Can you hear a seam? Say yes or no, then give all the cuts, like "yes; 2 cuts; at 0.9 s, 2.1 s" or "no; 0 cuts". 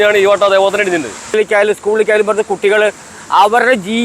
yes; 1 cut; at 1.3 s